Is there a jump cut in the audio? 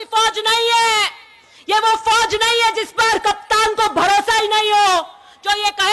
no; 0 cuts

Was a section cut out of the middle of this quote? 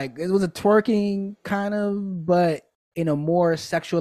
no; 0 cuts

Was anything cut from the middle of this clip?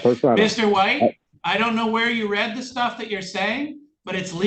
yes; 1 cut; at 1.3 s

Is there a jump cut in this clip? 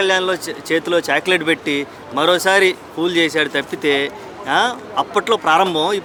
no; 0 cuts

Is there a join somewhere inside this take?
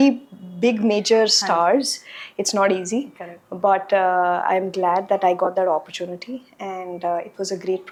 no; 0 cuts

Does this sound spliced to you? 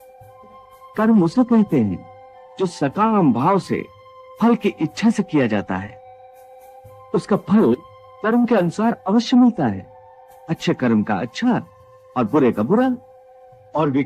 yes; 1 cut; at 0.9 s

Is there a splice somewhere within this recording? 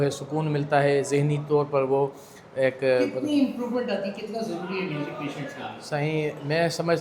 no; 0 cuts

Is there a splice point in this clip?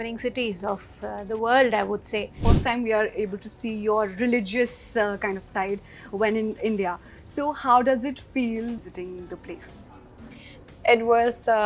yes; 2 cuts; at 2.4 s, 8.8 s

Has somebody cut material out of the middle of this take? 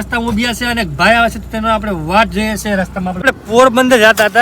yes; 1 cut; at 3.2 s

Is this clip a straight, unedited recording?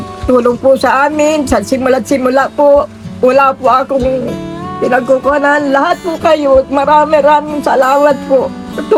yes; 0 cuts

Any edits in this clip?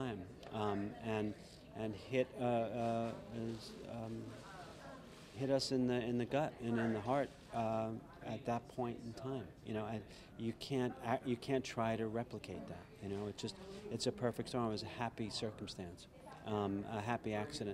no; 0 cuts

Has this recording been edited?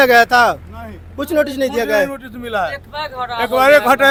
no; 0 cuts

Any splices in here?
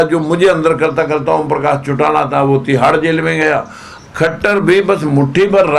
no; 0 cuts

